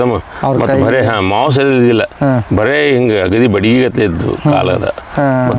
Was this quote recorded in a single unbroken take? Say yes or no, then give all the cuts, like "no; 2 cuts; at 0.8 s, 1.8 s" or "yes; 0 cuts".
yes; 0 cuts